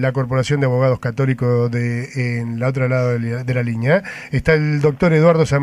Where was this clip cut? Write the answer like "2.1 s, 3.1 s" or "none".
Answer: 2.4 s